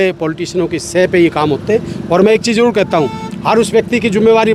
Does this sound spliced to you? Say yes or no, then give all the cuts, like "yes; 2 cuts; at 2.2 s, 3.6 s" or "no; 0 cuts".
no; 0 cuts